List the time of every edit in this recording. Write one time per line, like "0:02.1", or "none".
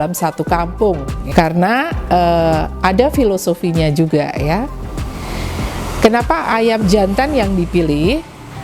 0:01.2